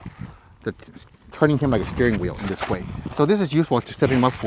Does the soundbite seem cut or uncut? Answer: uncut